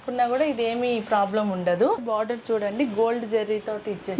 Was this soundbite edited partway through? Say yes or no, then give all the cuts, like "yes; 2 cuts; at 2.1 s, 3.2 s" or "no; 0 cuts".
yes; 1 cut; at 2.0 s